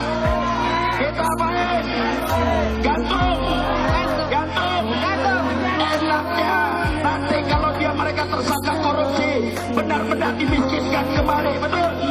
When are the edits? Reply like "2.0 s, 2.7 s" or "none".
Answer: none